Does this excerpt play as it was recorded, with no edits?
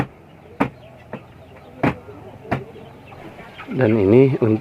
no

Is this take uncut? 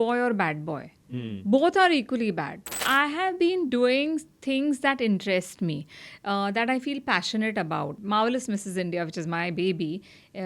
no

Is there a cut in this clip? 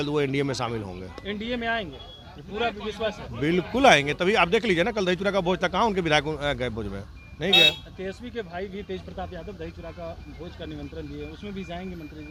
no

